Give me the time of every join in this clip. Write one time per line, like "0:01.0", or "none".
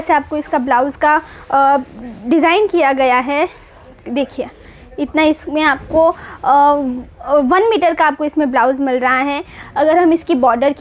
0:09.6